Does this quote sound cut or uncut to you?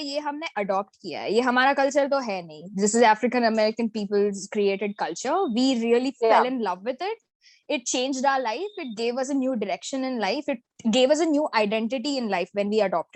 uncut